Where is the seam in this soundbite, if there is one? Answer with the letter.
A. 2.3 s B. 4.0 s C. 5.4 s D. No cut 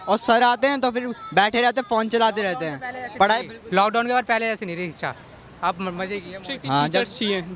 D